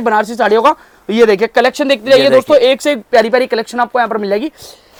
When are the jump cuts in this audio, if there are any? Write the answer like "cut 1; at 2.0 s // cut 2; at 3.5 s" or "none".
none